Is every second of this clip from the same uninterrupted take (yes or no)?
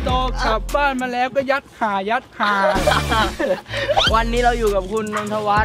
no